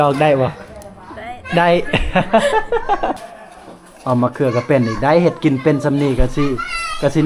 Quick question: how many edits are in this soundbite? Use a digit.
1